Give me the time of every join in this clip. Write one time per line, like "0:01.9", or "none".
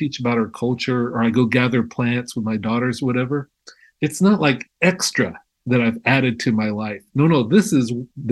none